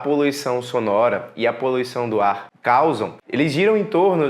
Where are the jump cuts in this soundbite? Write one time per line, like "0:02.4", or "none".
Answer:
0:02.5
0:03.2